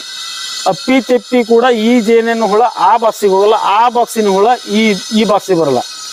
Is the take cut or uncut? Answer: uncut